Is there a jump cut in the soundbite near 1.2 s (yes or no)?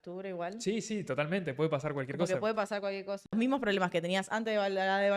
no